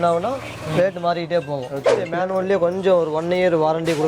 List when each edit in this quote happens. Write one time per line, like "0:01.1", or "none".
0:02.1

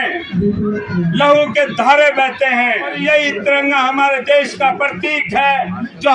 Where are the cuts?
0:02.9

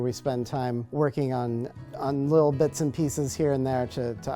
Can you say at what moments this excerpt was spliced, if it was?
0:00.9
0:01.8

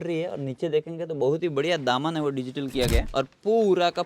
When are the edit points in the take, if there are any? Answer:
0:03.1

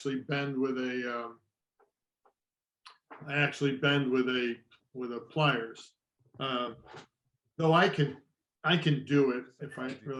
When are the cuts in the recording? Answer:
none

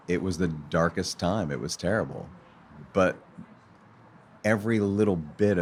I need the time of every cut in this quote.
none

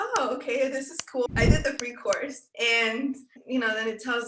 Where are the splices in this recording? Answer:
0:01.3
0:02.4

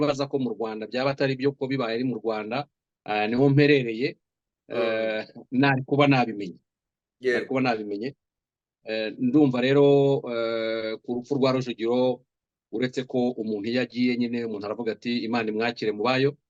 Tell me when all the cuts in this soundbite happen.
none

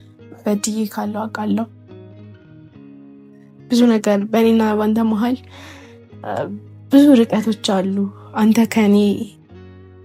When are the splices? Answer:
none

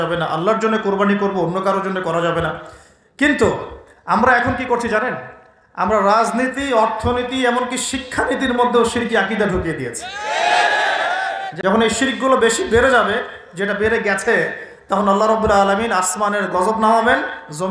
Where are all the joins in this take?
0:11.5

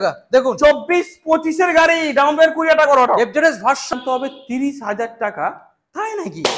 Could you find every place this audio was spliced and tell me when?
0:03.9

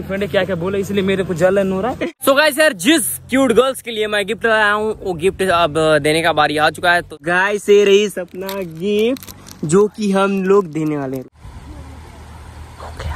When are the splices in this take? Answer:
0:02.1
0:07.3
0:11.2

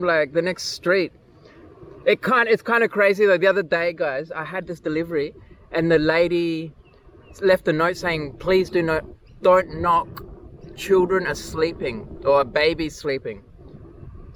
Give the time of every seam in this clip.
none

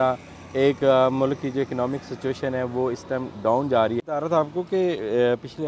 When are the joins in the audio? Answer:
0:04.0

